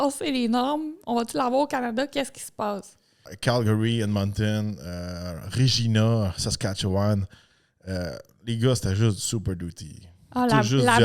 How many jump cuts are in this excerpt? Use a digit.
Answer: 1